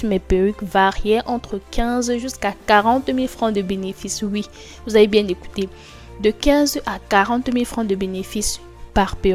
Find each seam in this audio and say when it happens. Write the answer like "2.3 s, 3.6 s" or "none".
none